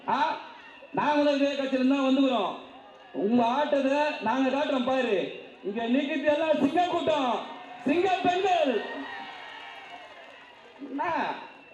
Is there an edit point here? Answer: no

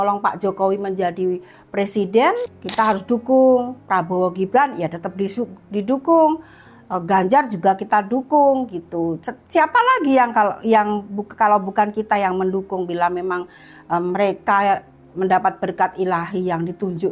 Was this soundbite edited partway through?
yes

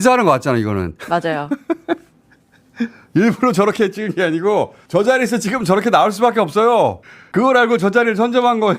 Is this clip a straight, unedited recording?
yes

